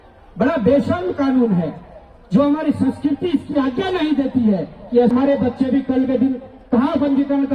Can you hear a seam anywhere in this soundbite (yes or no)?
yes